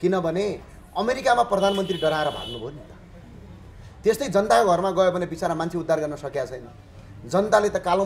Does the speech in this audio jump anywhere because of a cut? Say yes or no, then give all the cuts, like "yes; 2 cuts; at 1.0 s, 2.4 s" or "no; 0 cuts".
no; 0 cuts